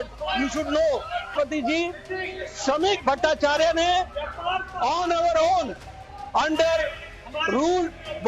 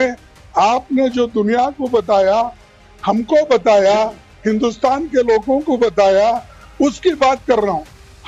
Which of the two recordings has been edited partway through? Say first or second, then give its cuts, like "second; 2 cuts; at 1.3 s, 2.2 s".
first; 1 cut; at 1.3 s